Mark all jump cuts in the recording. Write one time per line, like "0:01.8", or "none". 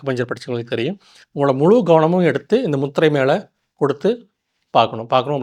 0:01.2